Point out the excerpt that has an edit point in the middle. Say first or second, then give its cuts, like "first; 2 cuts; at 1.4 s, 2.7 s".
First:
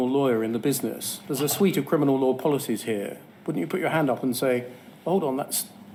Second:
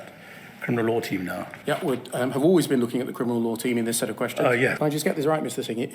second; 2 cuts; at 1.5 s, 4.8 s